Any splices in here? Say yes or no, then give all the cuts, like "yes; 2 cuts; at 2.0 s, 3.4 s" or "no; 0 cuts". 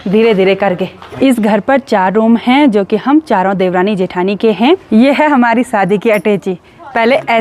yes; 2 cuts; at 1.0 s, 4.8 s